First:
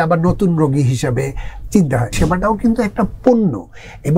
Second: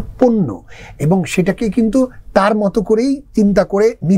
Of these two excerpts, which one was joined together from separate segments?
first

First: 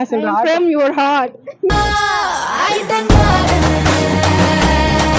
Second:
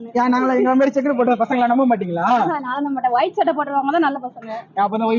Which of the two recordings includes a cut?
first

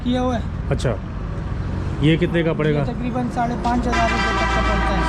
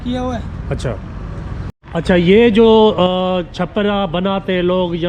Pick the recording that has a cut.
second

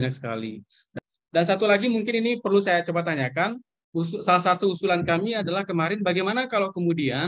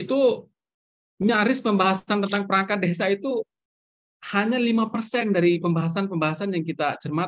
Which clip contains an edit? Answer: first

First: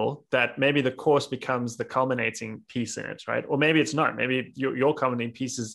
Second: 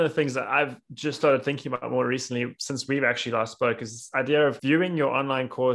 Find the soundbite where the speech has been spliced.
second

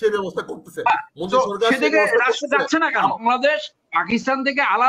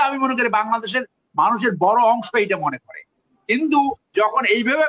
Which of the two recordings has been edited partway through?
first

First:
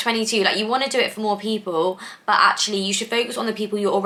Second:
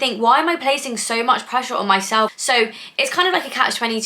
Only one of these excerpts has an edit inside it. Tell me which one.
second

